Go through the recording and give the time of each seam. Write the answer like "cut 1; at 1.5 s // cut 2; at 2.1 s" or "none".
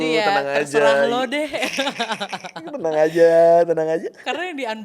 none